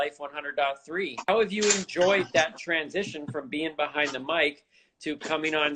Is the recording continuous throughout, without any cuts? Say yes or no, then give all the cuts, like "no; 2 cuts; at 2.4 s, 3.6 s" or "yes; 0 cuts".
no; 1 cut; at 1.3 s